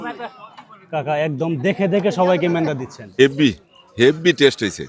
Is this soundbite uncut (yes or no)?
no